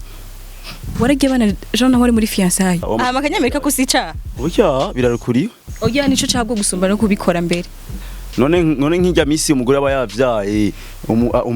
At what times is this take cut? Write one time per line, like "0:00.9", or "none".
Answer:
0:02.9